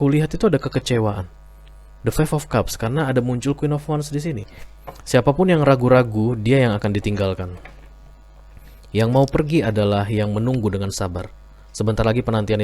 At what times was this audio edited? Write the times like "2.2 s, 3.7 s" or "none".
4.6 s